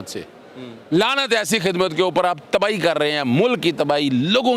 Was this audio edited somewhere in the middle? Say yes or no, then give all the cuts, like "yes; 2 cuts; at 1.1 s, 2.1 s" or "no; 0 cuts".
no; 0 cuts